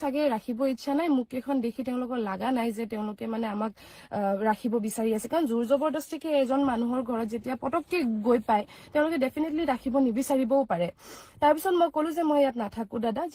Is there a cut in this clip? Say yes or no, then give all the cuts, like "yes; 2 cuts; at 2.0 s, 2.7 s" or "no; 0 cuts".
no; 0 cuts